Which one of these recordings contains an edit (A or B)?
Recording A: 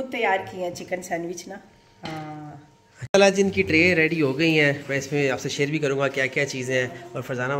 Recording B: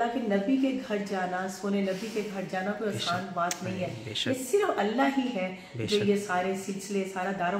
A